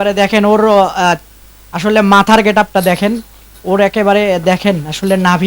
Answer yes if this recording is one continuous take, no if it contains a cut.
yes